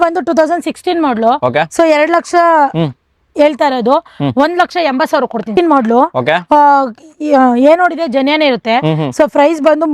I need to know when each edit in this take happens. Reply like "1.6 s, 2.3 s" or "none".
5.5 s